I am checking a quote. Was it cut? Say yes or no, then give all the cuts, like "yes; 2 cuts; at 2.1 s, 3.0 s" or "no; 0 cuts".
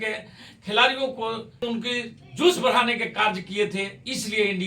yes; 1 cut; at 1.5 s